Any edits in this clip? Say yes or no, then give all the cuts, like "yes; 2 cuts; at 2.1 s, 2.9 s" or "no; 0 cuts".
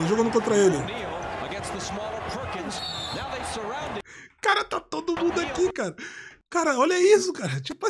yes; 1 cut; at 6.3 s